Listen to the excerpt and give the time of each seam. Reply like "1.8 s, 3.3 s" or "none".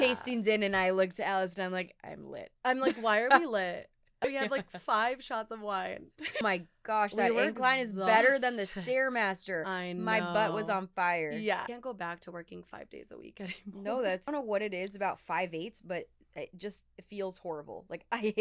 4.2 s, 6.4 s, 11.7 s, 14.3 s